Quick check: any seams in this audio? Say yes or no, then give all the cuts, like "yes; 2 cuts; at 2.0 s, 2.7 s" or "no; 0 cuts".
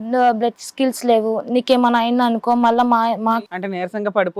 yes; 1 cut; at 3.4 s